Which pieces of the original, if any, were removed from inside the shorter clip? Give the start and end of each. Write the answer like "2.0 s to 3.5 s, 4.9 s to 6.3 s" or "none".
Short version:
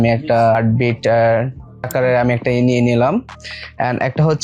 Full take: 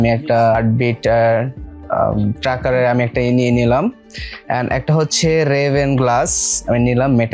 1.9 s to 2.6 s